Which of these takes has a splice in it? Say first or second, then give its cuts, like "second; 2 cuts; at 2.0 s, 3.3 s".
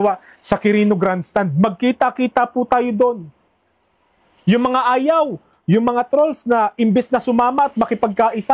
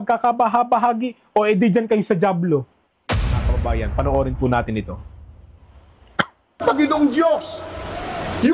second; 1 cut; at 3.3 s